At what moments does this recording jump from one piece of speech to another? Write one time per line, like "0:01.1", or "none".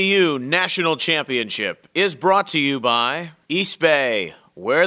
0:03.3